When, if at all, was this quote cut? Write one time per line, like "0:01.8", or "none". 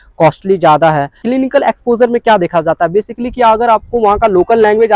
0:01.2